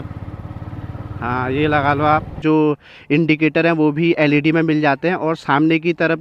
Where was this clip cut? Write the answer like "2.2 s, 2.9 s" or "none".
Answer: 2.4 s